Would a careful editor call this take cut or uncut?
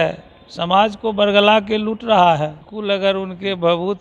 cut